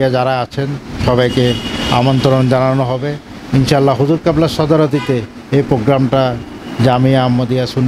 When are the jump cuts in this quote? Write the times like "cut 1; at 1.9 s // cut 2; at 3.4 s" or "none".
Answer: none